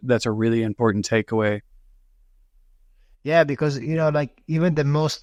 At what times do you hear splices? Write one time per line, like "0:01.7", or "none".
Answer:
none